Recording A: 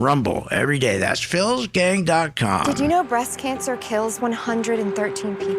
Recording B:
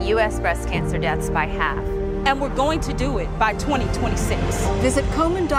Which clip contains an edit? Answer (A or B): A